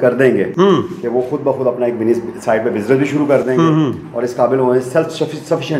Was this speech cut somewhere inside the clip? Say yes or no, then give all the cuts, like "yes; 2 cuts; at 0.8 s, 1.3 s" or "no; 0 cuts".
no; 0 cuts